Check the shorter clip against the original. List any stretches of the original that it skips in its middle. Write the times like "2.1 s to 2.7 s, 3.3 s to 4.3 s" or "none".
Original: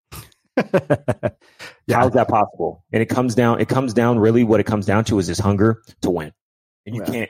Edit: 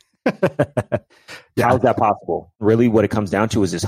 2.9 s to 4.2 s